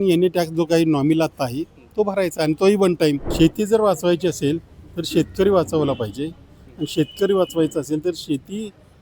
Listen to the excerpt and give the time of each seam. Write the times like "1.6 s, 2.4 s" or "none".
3.3 s